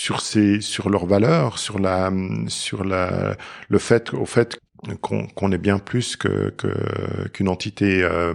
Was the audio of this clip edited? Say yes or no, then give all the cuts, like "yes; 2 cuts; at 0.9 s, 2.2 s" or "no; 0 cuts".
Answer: yes; 1 cut; at 4.5 s